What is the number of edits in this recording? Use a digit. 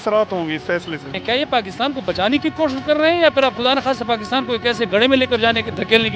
1